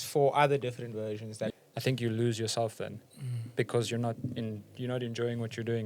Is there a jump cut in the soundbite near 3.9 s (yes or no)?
no